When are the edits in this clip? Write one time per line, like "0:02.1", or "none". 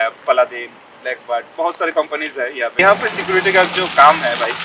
0:02.8